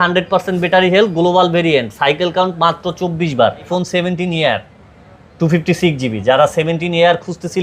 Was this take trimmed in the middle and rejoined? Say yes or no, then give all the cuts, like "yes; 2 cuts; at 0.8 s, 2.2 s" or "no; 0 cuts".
yes; 1 cut; at 3.7 s